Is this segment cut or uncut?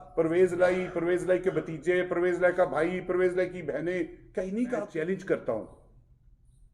cut